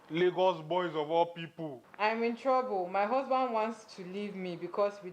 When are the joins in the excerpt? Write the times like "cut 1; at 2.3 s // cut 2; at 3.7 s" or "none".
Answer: cut 1; at 1.9 s